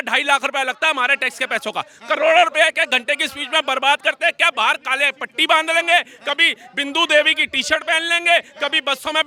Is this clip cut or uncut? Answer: uncut